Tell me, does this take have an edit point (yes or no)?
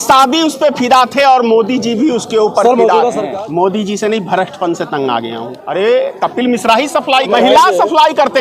yes